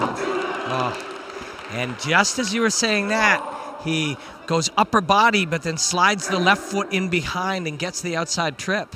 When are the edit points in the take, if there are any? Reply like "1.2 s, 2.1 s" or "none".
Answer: none

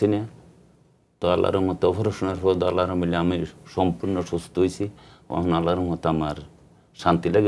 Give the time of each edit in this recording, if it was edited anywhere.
none

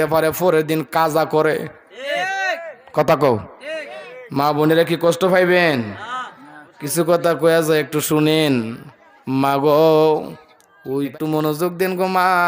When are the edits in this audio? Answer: 11.1 s

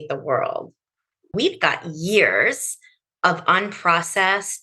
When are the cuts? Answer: 1.3 s

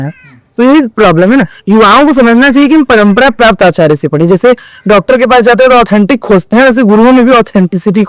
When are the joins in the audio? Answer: none

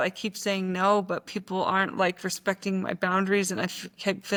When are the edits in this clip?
none

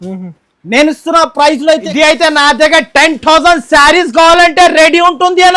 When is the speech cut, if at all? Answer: 1.8 s

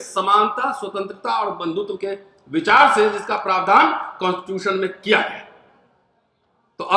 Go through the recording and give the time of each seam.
none

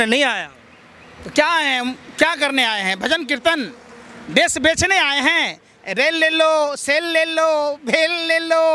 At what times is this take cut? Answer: none

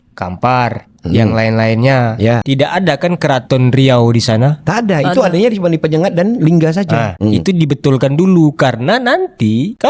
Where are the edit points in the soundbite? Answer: 7.1 s

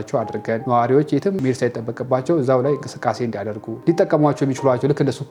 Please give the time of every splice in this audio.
1.4 s, 3.8 s

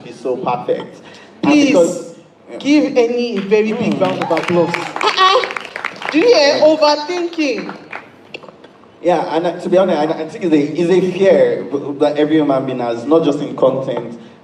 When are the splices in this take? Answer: none

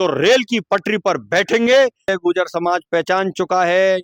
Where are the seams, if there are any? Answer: 2.1 s

